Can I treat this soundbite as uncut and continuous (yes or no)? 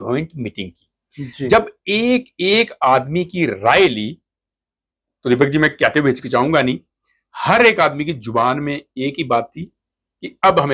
yes